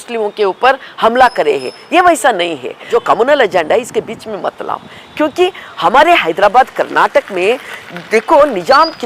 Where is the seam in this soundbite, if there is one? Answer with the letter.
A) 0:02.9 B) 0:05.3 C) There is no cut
A